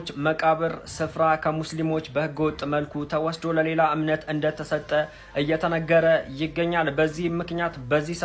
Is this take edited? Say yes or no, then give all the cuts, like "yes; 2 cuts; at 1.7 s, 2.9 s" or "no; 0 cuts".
no; 0 cuts